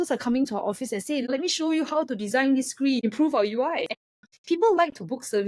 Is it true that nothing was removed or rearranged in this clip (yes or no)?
no